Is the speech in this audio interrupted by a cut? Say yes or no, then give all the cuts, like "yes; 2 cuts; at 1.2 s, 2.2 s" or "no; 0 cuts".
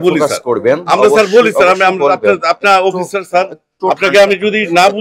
no; 0 cuts